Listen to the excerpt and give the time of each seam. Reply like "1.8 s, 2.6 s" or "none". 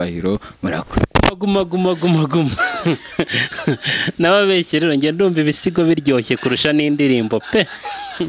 1.2 s